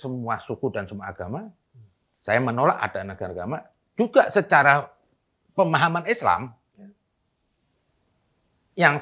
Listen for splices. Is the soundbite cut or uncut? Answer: uncut